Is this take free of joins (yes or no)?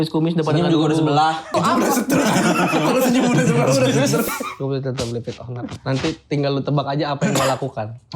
no